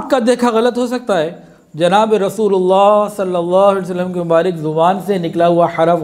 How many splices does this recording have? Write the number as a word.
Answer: zero